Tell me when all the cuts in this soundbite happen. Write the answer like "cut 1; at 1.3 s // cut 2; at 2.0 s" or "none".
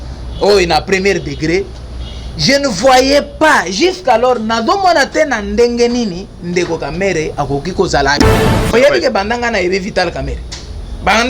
cut 1; at 8.7 s